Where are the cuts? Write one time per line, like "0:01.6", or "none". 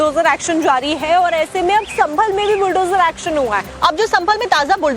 0:02.3